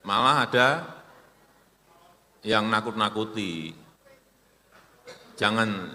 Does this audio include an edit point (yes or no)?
no